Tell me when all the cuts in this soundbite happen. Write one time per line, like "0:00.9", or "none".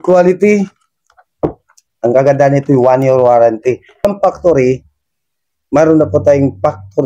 0:04.1